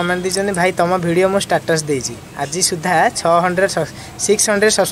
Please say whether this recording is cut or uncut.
uncut